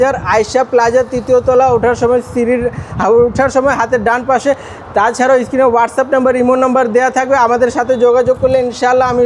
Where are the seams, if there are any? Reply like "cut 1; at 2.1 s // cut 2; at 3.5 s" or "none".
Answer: none

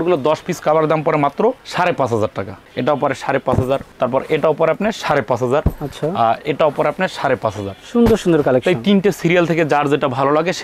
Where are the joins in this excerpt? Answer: none

